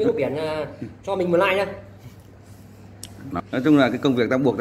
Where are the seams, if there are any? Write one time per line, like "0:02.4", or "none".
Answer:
0:03.3

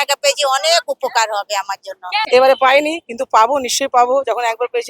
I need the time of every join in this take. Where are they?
0:02.3

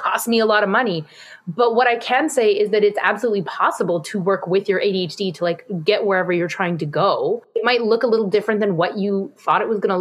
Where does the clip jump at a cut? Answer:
0:07.4

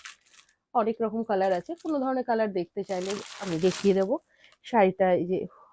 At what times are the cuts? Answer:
none

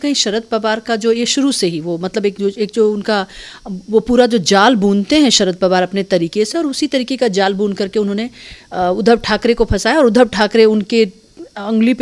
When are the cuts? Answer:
none

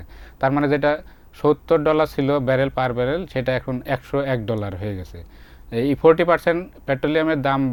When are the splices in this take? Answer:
none

